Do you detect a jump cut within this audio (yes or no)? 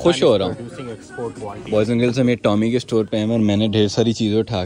yes